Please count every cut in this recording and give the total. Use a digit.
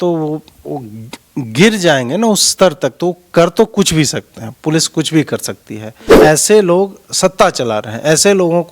1